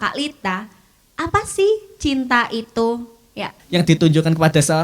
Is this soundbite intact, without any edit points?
no; 1 cut; at 3.5 s

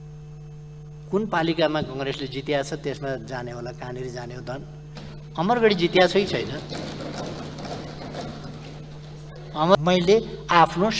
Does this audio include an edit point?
yes; 1 cut; at 9.8 s

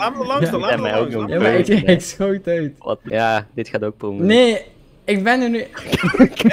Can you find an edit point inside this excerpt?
yes; 1 cut; at 3.0 s

